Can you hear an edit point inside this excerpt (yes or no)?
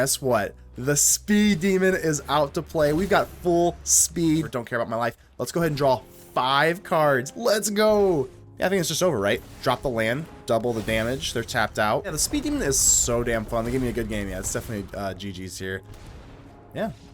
yes